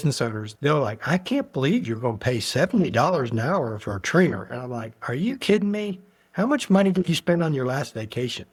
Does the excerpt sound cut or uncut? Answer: uncut